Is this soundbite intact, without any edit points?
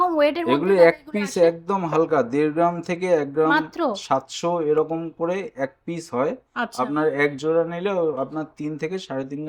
yes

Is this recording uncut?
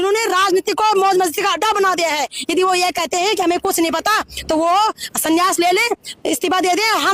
yes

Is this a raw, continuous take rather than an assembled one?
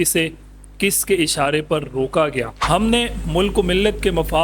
no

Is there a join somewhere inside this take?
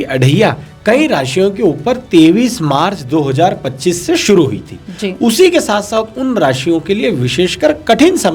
no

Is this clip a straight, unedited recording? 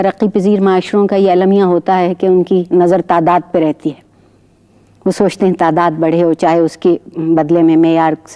yes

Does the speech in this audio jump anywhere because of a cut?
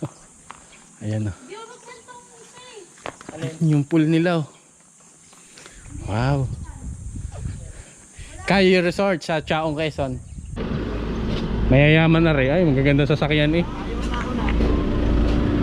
yes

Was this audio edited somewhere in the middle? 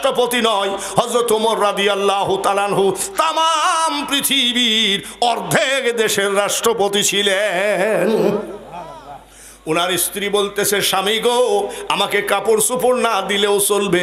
no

